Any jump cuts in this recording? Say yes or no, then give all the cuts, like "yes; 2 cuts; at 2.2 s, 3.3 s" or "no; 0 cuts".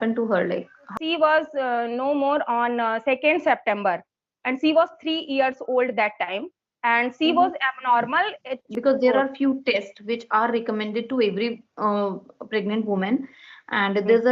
yes; 2 cuts; at 0.9 s, 8.6 s